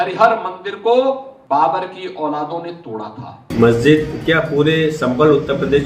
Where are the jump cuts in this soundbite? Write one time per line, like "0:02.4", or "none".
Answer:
0:01.3
0:03.3